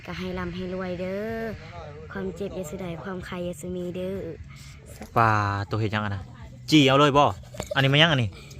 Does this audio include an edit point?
yes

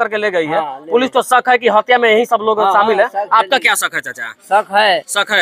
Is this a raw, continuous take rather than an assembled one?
yes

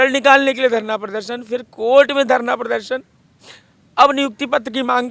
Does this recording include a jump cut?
no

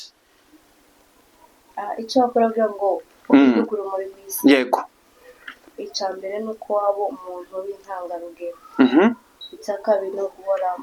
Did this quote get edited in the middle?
no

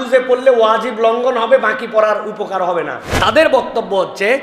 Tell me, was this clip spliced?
yes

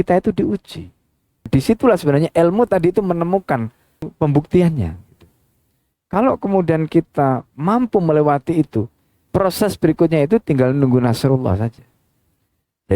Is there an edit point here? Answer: yes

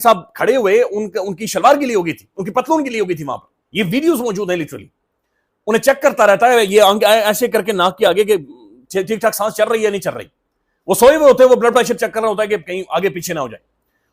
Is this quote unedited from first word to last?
yes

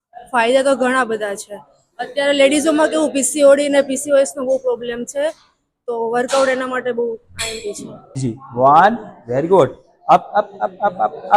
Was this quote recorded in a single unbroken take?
no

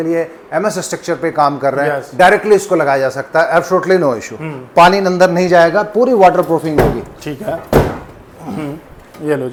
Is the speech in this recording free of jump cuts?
yes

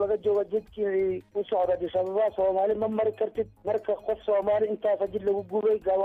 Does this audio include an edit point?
no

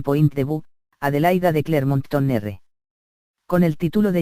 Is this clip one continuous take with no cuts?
yes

